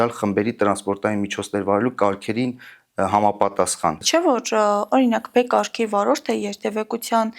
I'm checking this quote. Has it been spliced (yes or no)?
yes